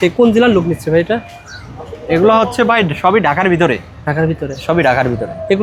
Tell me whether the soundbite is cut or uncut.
uncut